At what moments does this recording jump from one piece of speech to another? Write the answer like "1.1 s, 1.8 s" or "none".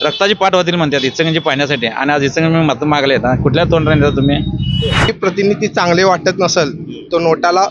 5.1 s